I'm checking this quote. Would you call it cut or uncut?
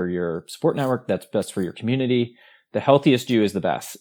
uncut